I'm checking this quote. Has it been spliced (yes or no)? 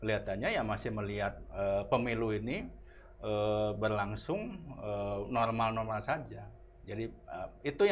no